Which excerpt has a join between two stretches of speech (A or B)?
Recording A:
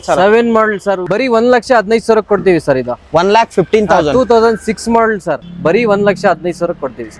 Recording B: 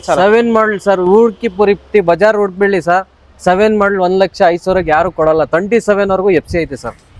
A